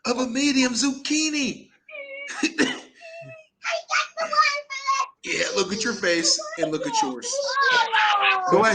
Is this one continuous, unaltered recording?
yes; 0 cuts

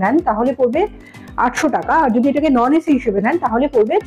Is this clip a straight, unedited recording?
yes; 0 cuts

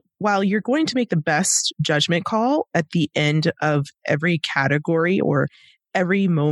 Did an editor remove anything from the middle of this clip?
no; 0 cuts

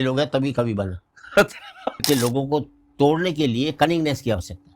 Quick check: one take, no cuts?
no; 1 cut; at 2.0 s

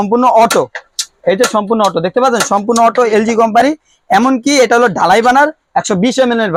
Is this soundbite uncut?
yes; 0 cuts

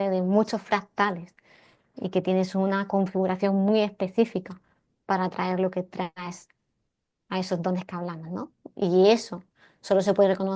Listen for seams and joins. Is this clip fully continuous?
yes; 0 cuts

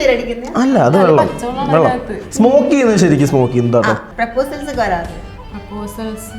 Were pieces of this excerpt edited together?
yes; 1 cut; at 4.1 s

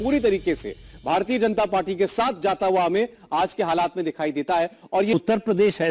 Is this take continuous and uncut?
no; 2 cuts; at 2.4 s, 5.1 s

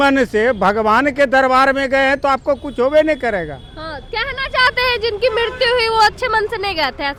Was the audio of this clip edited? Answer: no; 0 cuts

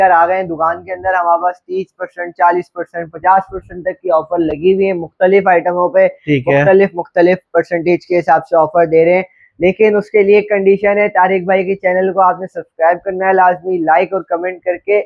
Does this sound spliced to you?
no; 0 cuts

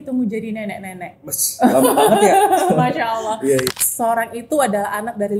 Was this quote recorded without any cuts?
no; 1 cut; at 3.7 s

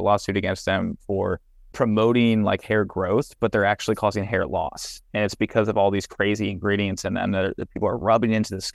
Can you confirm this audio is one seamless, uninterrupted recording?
yes; 0 cuts

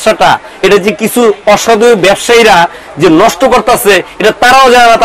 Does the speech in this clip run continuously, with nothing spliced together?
yes; 0 cuts

